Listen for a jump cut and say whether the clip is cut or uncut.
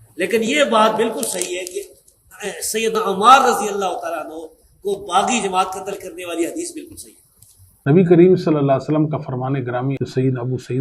cut